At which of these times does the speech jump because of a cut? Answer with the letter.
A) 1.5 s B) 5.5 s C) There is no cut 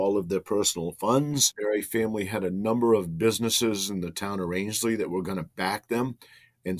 A